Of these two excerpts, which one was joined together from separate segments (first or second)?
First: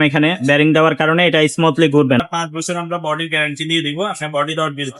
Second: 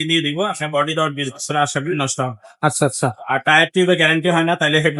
first